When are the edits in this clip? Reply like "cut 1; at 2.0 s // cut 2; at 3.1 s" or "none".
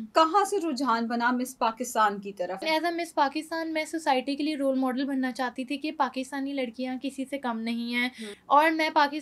cut 1; at 2.6 s // cut 2; at 8.3 s